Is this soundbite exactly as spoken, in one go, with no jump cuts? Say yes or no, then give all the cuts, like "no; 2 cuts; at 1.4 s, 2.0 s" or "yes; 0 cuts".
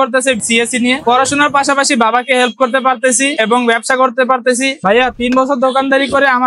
no; 1 cut; at 4.8 s